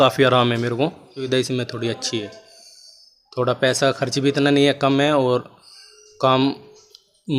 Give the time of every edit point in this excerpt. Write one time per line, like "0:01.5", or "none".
0:01.2